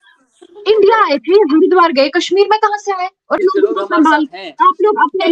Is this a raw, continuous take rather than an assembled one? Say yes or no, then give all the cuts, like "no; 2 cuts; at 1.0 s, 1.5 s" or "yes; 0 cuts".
no; 1 cut; at 3.4 s